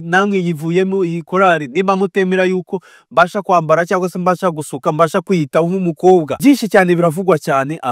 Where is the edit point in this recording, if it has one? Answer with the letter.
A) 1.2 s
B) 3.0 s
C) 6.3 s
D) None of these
C